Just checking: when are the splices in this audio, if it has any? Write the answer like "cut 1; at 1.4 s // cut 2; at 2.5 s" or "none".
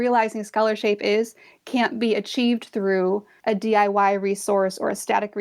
cut 1; at 3.3 s